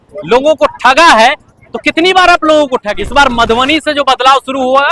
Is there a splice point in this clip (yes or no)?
yes